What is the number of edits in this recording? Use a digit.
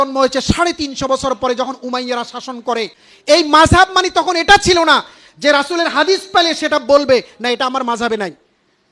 1